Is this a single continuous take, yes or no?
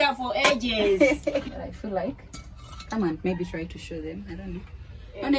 no